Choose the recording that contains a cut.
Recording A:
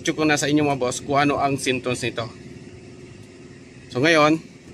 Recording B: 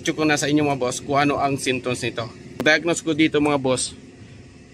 B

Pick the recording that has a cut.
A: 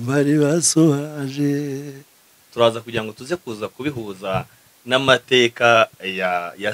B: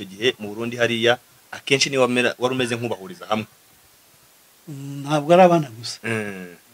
A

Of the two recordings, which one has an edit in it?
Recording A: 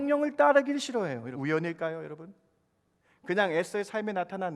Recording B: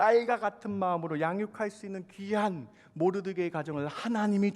A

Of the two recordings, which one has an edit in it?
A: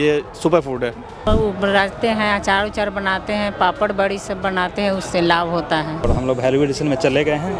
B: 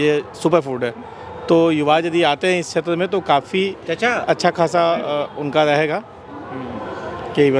A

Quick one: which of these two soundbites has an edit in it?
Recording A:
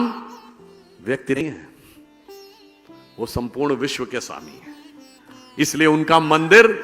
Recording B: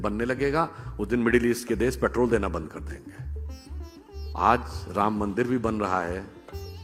A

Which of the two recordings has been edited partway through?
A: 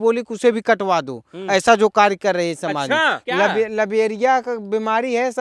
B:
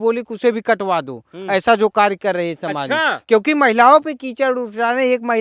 A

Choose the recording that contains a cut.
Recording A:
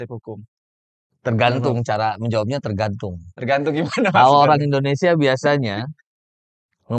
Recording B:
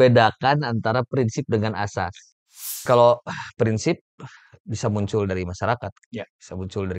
B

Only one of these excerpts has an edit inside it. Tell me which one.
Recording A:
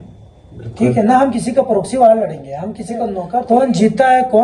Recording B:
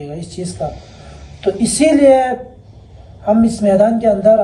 A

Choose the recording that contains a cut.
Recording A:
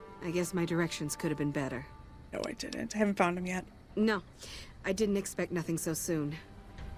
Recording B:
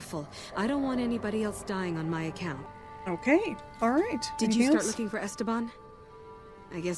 B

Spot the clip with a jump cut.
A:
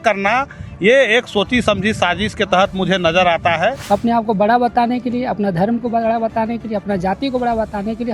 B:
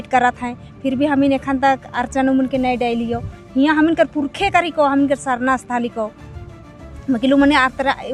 A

